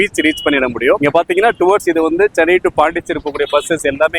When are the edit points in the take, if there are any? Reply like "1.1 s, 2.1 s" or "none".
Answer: none